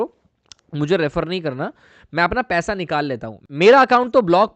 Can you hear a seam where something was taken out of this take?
yes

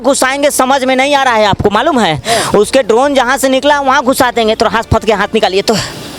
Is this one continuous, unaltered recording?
yes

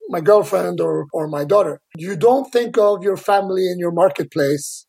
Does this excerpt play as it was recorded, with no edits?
no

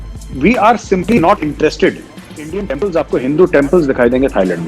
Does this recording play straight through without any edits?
no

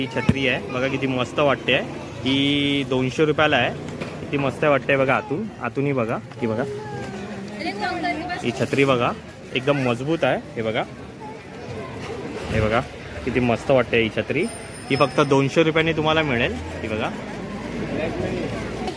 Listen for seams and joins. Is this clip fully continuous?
yes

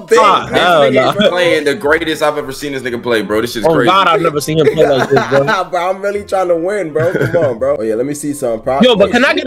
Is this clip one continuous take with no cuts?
yes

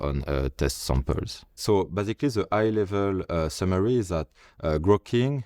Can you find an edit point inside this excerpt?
yes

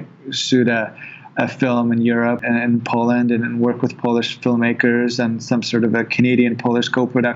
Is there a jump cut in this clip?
yes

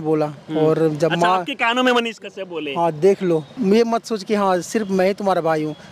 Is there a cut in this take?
yes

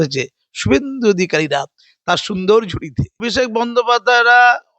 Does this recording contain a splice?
yes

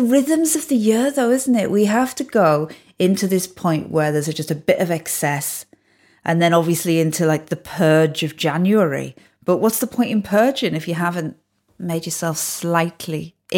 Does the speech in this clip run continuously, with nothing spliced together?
yes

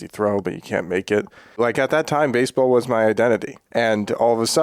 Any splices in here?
yes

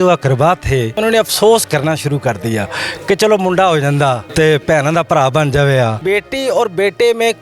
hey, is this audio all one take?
no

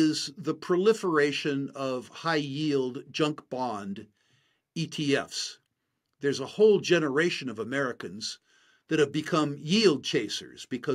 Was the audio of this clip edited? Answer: no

